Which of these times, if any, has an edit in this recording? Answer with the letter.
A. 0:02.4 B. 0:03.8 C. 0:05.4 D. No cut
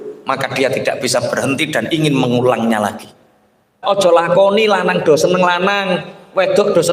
B